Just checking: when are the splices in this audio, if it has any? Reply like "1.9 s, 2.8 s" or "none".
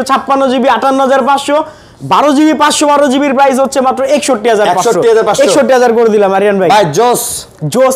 none